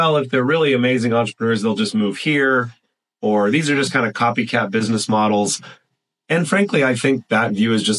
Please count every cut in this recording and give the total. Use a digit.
0